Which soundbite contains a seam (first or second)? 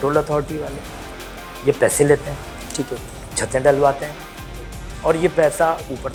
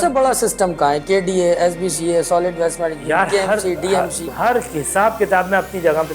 second